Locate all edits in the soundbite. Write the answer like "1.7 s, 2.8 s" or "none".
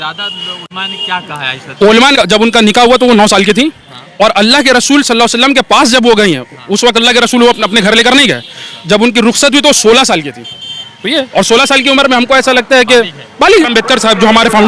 2.2 s, 13.7 s